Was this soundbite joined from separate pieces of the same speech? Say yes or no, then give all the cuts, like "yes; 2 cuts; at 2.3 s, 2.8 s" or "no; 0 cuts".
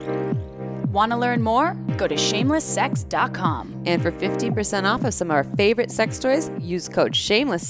yes; 1 cut; at 0.9 s